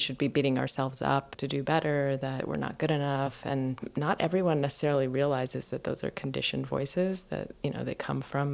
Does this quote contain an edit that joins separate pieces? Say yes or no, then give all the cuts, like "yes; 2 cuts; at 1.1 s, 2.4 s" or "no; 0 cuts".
yes; 3 cuts; at 1.4 s, 2.4 s, 3.4 s